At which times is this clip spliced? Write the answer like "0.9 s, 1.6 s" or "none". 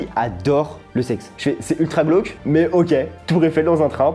1.3 s